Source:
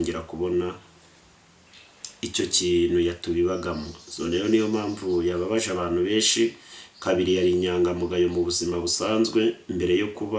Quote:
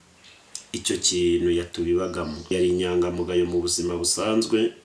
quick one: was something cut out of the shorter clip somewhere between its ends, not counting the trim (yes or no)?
yes